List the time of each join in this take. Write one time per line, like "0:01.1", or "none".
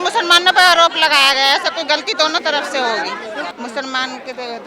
0:03.5